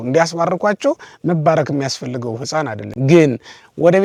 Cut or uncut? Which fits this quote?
uncut